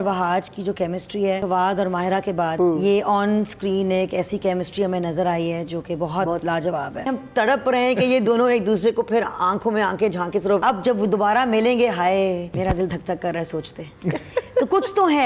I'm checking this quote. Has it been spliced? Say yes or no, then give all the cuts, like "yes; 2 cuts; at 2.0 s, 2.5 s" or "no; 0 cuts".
yes; 5 cuts; at 1.4 s, 2.5 s, 7.1 s, 10.6 s, 12.5 s